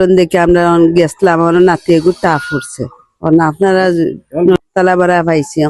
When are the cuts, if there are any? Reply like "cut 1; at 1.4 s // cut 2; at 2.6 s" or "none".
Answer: cut 1; at 4.6 s